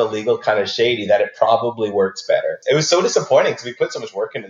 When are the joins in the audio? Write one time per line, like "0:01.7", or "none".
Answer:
0:02.6